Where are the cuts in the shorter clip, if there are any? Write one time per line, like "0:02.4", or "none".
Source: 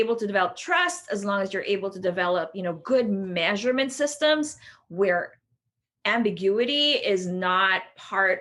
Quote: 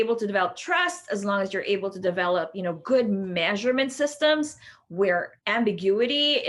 0:05.4